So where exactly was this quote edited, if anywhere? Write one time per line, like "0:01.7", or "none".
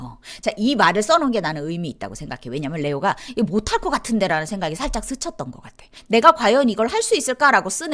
0:05.9